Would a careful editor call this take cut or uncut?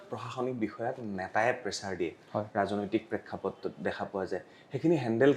uncut